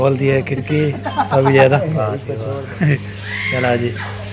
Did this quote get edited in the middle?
yes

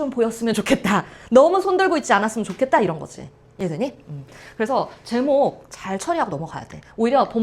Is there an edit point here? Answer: no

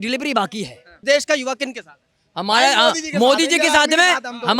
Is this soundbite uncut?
no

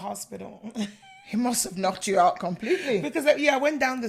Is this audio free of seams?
yes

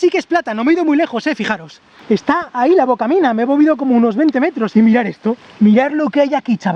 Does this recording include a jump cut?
yes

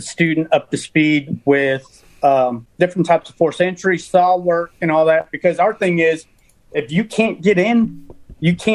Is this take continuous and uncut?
no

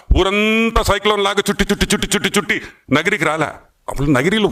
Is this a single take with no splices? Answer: yes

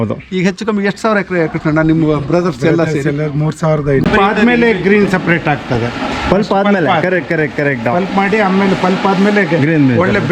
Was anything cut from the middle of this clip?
yes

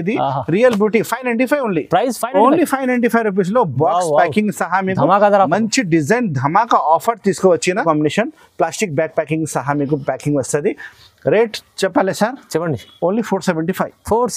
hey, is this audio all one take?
no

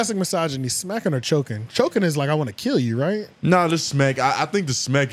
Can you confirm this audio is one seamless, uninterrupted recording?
yes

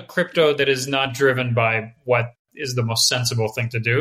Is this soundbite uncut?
yes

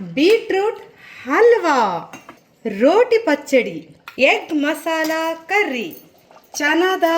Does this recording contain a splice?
yes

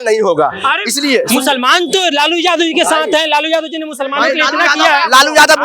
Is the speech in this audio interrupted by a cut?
no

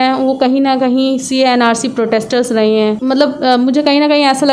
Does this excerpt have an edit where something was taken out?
yes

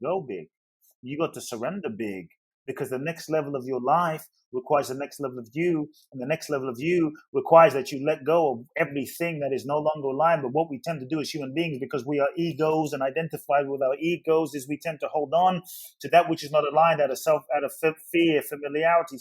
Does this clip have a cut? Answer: no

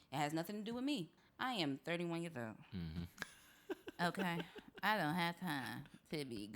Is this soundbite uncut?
no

